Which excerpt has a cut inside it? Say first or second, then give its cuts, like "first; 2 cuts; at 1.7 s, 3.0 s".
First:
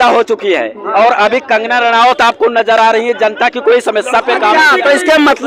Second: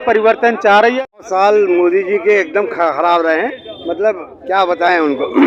second; 1 cut; at 1.2 s